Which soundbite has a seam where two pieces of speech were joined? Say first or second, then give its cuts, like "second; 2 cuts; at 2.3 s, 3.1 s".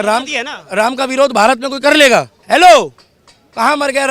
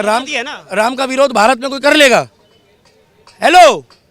first; 1 cut; at 2.4 s